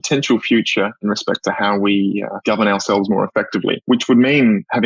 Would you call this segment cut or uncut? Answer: cut